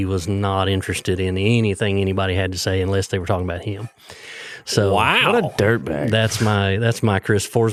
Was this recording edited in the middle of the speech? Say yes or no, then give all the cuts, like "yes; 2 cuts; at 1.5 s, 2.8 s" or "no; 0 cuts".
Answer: no; 0 cuts